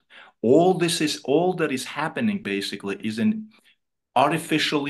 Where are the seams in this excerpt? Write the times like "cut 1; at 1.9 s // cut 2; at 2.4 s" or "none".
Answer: none